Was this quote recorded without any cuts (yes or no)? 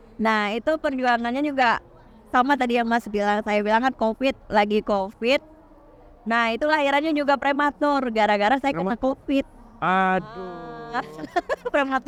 yes